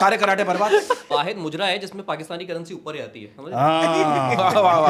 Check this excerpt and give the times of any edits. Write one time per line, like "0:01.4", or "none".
0:01.1